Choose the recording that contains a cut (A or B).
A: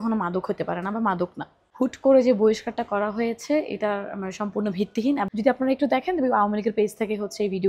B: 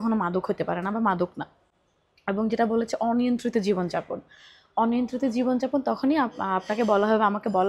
A